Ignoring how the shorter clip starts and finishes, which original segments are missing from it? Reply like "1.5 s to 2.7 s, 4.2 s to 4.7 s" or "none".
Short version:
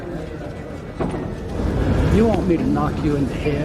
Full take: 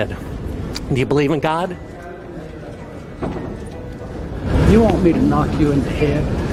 3.7 s to 4.1 s

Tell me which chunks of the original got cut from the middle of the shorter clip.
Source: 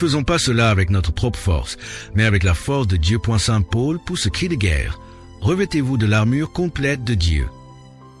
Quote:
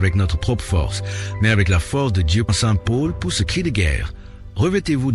3.2 s to 3.3 s

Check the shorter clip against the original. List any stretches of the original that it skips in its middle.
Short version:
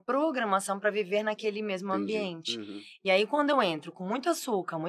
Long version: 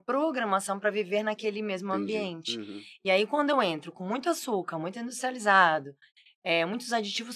none

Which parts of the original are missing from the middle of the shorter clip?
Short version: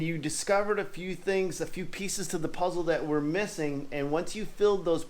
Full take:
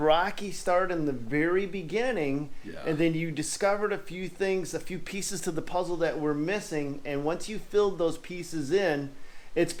none

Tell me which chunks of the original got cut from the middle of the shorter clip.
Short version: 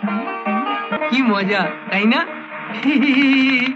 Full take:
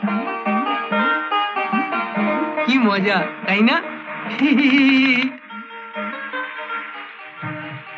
1.0 s to 2.5 s

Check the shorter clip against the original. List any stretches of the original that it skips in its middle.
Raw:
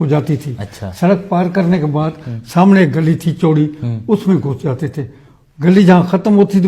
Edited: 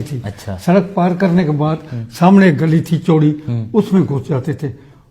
none

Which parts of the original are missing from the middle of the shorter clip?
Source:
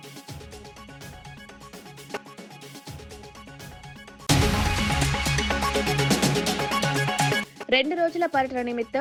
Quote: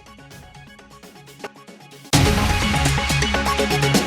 2.8 s to 4.3 s

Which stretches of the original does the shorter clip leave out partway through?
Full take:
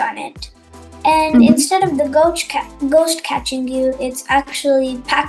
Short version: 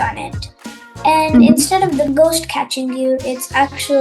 2.1 s to 2.8 s

